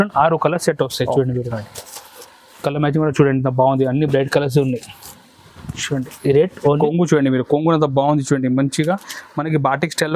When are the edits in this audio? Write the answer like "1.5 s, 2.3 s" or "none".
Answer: 6.8 s